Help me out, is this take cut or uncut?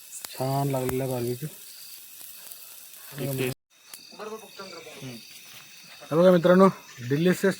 cut